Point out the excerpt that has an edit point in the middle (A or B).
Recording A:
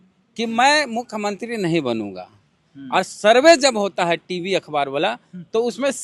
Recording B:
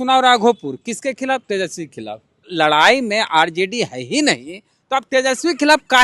B